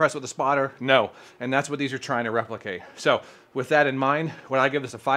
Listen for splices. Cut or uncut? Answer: uncut